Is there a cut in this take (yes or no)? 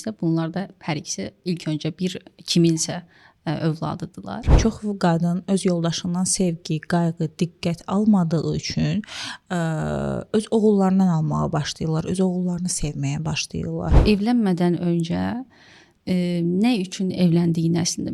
yes